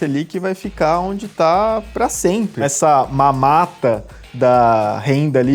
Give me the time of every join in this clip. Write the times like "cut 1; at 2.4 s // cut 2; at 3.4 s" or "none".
cut 1; at 2.7 s

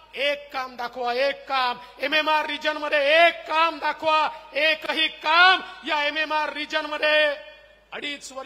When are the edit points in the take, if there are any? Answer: none

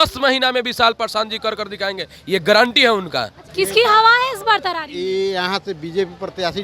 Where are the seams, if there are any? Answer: cut 1; at 3.4 s

